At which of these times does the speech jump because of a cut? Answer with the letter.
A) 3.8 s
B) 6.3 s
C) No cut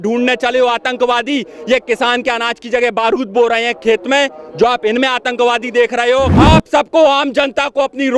B